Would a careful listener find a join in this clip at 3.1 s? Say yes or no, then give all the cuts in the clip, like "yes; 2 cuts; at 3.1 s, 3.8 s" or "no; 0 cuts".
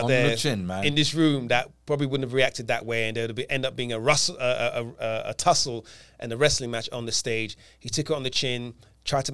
no; 0 cuts